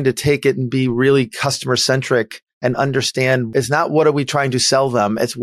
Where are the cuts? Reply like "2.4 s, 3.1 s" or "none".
3.5 s